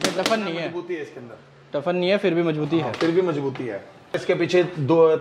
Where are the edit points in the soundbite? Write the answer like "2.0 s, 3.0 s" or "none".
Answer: 4.2 s

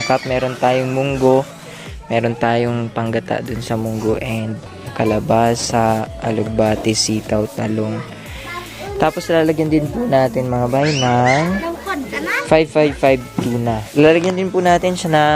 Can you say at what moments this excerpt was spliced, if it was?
13.8 s

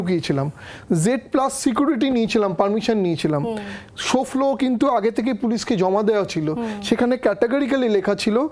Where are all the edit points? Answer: none

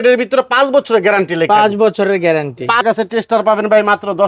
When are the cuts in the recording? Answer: 2.8 s

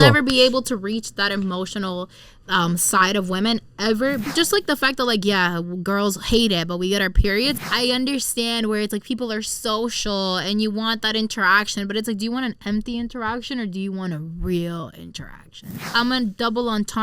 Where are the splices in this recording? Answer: 4.3 s, 7.6 s, 15.8 s

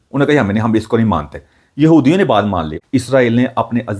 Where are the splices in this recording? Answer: 2.7 s

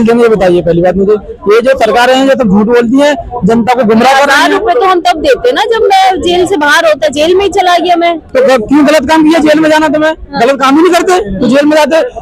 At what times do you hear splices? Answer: none

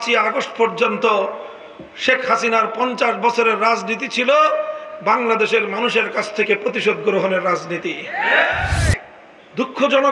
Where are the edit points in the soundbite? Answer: 8.8 s

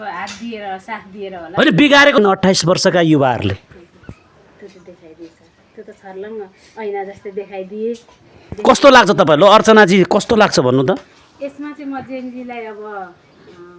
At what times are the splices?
2.2 s

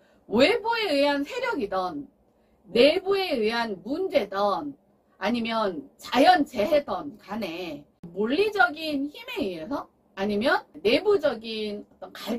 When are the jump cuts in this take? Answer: 8.1 s, 10.7 s

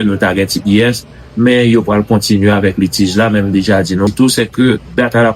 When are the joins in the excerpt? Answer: 4.1 s

